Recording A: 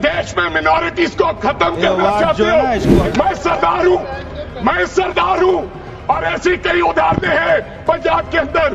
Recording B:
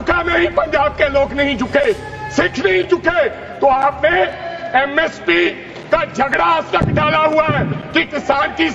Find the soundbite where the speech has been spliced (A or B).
A